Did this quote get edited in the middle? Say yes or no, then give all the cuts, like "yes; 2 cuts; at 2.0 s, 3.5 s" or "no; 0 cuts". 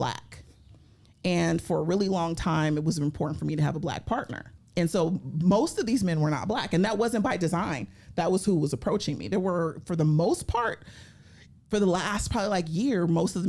no; 0 cuts